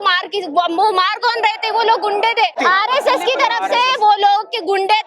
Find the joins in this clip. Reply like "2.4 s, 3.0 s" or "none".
2.6 s